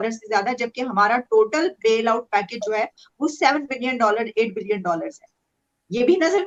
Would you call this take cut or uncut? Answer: uncut